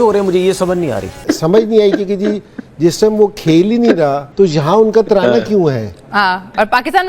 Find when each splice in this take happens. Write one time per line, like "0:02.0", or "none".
0:01.1